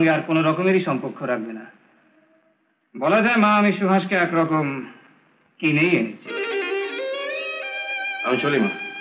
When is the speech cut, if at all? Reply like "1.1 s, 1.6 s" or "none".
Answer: none